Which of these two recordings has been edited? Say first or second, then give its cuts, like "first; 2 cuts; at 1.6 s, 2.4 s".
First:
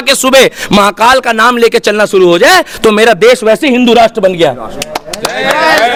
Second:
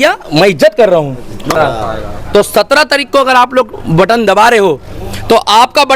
second; 1 cut; at 1.6 s